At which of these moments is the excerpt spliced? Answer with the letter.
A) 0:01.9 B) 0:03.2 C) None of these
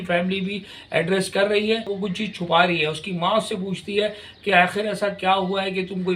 A